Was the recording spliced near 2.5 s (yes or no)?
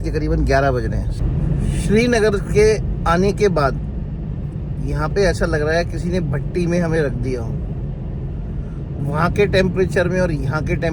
no